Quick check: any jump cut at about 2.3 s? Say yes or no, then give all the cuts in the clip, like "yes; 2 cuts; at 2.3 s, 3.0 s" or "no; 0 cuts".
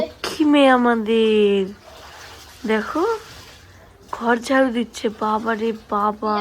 no; 0 cuts